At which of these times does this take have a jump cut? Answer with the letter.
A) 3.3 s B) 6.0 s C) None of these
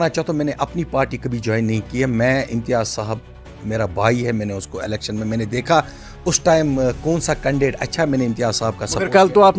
C